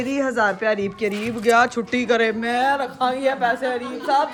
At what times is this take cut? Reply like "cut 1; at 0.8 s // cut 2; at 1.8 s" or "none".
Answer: none